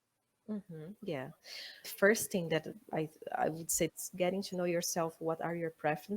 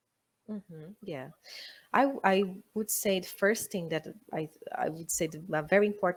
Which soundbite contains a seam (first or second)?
first